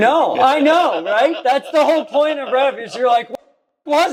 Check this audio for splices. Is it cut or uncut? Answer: uncut